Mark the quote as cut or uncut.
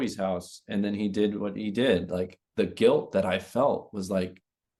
uncut